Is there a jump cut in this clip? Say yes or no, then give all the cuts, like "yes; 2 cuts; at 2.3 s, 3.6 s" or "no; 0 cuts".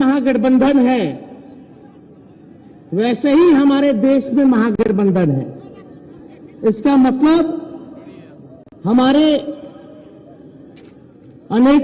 no; 0 cuts